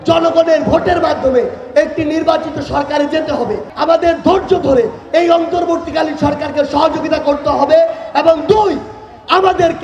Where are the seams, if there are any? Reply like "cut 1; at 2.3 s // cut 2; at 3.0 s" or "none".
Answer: cut 1; at 3.7 s